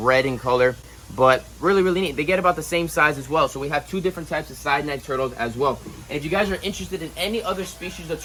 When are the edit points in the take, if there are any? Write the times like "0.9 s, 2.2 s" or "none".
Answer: none